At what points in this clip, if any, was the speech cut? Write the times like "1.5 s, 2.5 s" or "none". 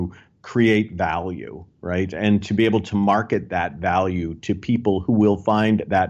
none